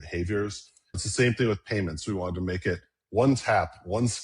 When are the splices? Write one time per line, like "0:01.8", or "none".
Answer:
0:01.0